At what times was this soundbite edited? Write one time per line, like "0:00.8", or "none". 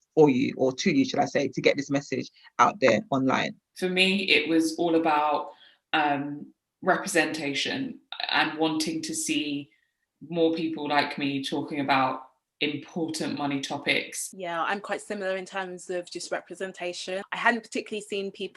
0:03.6
0:14.2
0:17.2